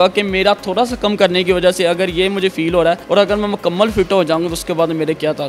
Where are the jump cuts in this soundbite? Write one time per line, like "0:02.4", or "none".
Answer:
0:03.0

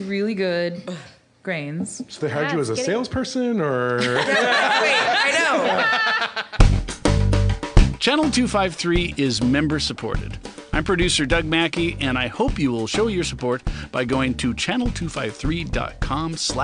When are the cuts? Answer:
0:06.4

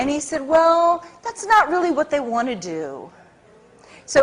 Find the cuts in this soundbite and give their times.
0:01.9

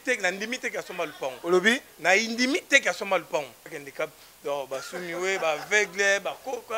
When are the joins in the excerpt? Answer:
0:03.8

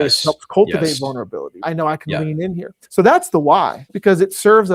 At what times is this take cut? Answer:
0:01.6
0:02.8
0:03.9

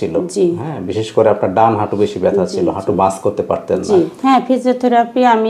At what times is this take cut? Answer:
0:04.1

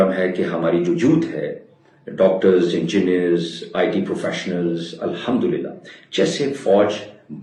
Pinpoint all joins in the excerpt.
none

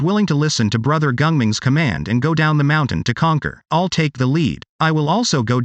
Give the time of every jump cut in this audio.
0:03.6
0:04.7

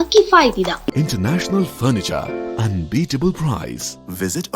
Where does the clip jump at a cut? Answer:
0:00.9

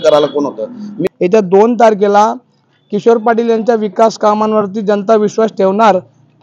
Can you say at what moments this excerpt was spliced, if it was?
0:00.9

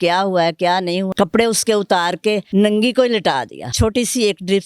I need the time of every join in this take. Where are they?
0:01.1
0:02.4
0:03.7

